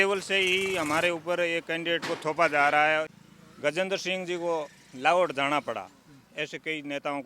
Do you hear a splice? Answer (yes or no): yes